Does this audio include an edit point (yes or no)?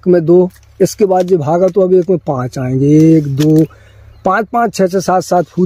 no